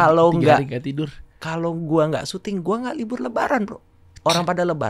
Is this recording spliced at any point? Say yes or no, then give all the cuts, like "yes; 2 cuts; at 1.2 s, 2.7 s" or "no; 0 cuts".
no; 0 cuts